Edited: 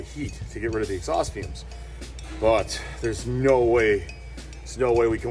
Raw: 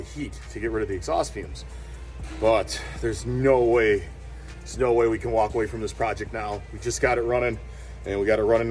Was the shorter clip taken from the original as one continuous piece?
yes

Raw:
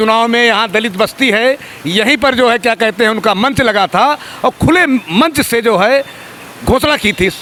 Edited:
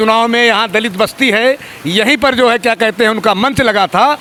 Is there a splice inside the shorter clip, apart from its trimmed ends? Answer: no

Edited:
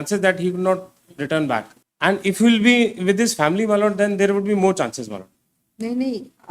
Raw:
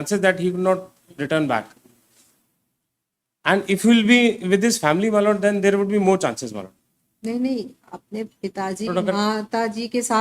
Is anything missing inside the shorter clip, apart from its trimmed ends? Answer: yes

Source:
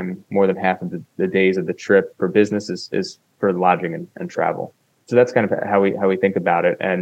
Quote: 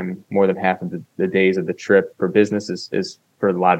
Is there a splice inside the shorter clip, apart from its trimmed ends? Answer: no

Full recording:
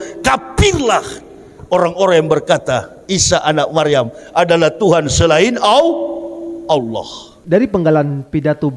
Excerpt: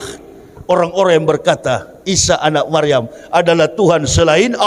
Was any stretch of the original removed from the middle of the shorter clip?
no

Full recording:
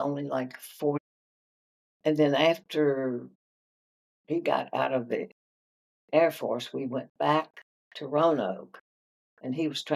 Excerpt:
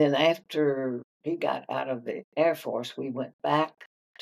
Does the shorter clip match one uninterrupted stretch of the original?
no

